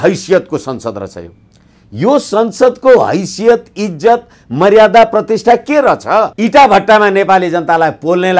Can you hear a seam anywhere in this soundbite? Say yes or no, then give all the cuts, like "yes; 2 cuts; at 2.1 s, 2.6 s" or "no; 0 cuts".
yes; 1 cut; at 6.3 s